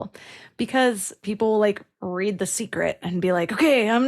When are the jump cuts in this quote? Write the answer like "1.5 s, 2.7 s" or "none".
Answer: 1.2 s